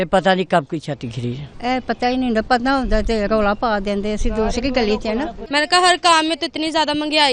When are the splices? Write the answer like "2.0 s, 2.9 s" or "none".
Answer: 1.5 s, 5.4 s